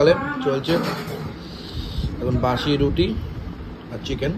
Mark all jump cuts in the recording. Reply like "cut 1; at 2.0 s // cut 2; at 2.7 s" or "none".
none

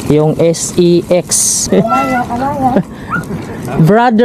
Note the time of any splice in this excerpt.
cut 1; at 1.7 s

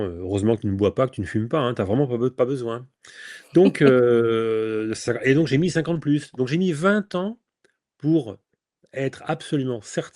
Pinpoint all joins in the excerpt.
none

